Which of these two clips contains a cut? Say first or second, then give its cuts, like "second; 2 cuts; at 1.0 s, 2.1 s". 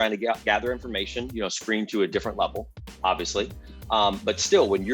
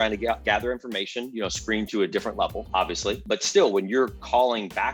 second; 1 cut; at 3.2 s